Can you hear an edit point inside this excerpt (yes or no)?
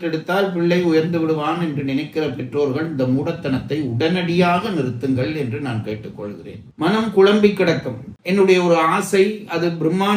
yes